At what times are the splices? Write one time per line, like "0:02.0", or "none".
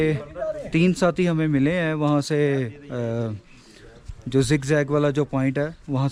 none

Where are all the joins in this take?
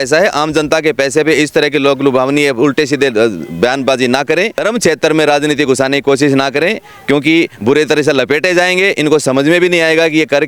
0:04.6

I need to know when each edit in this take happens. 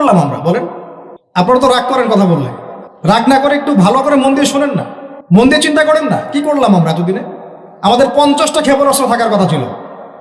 0:01.5
0:03.2
0:05.4

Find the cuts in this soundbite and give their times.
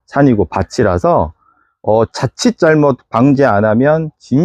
none

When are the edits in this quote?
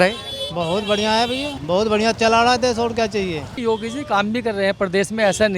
0:03.5

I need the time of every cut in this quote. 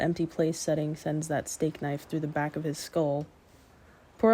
0:02.8

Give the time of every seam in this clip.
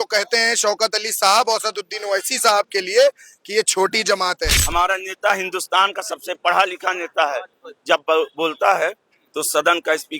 0:04.6

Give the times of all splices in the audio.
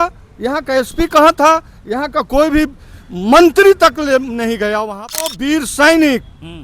0:05.3

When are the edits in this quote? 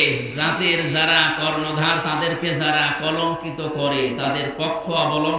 none

